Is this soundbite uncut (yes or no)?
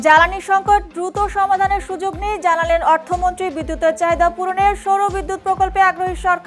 yes